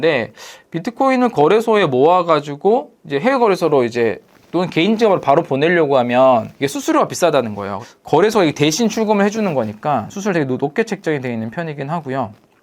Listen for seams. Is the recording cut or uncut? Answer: cut